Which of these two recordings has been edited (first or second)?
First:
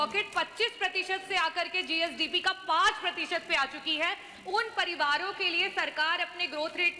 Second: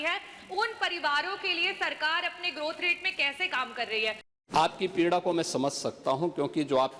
second